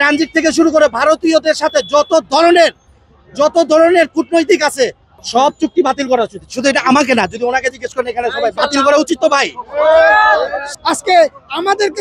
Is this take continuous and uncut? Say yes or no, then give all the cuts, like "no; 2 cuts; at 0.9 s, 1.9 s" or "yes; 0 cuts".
no; 2 cuts; at 5.2 s, 10.7 s